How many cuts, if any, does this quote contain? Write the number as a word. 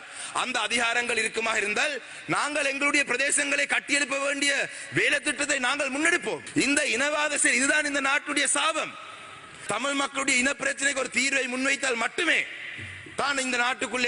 two